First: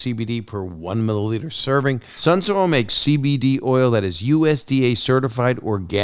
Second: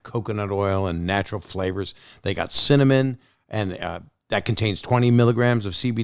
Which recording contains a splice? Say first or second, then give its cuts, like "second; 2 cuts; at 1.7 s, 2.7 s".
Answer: first; 1 cut; at 2.1 s